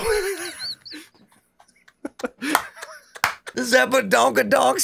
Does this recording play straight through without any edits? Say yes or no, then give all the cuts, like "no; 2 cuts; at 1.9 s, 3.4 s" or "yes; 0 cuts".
no; 1 cut; at 3.6 s